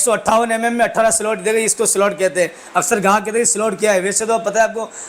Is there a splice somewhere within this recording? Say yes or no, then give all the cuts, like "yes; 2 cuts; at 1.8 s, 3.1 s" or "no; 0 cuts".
no; 0 cuts